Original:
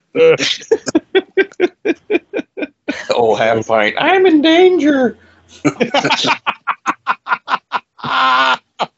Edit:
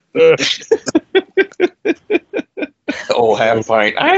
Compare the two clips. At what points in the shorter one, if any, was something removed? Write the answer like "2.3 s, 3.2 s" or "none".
none